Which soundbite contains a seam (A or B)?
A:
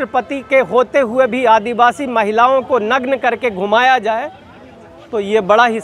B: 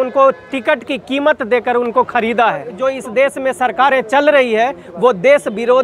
B